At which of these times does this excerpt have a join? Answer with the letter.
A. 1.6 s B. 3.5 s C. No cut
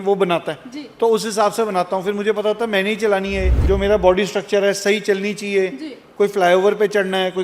B